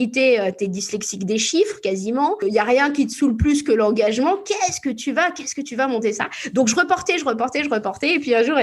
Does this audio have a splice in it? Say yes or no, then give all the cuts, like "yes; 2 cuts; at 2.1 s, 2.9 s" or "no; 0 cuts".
yes; 1 cut; at 2.5 s